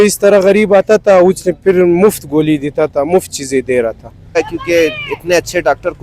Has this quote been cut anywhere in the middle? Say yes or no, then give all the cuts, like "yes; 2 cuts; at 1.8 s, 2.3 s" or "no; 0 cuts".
yes; 1 cut; at 4.4 s